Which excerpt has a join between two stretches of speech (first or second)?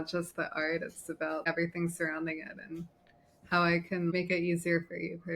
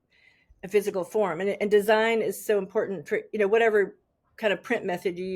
first